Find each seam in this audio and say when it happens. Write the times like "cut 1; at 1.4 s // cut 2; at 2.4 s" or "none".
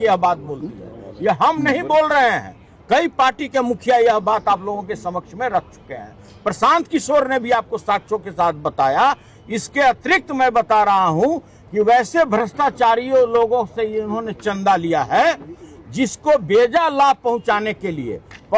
none